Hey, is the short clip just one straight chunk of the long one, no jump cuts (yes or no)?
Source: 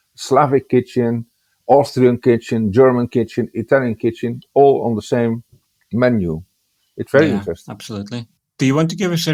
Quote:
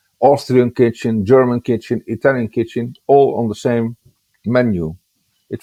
yes